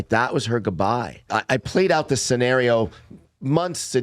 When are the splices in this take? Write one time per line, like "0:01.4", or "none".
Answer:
0:01.3